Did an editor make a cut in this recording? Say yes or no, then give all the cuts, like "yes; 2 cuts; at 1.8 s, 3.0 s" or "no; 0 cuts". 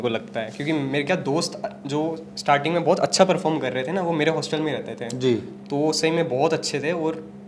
no; 0 cuts